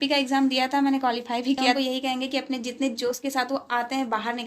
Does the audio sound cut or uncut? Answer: cut